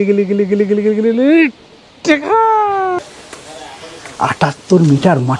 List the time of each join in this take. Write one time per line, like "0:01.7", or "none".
0:03.0